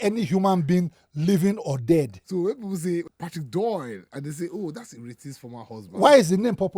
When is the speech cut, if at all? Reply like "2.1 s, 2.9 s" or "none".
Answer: 2.2 s, 3.0 s